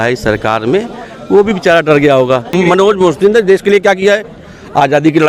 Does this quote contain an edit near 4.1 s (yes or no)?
no